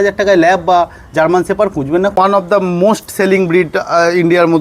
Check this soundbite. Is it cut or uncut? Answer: cut